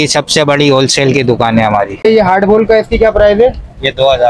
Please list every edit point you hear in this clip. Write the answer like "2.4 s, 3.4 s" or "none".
2.1 s